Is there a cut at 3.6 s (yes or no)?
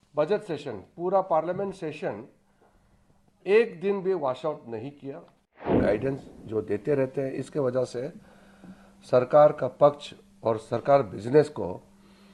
no